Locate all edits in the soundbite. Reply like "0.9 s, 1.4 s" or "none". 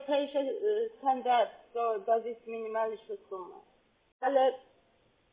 4.3 s